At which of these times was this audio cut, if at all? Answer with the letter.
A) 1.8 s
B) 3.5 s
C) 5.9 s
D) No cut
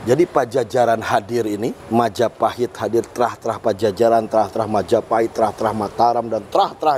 A